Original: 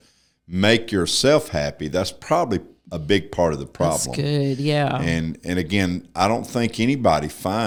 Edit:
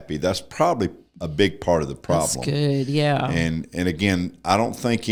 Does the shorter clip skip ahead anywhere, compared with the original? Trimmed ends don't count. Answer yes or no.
no